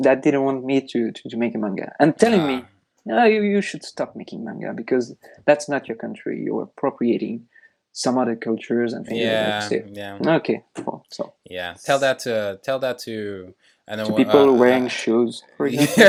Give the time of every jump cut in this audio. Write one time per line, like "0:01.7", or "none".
none